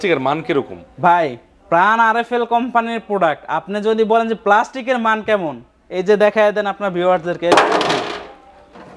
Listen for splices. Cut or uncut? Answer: uncut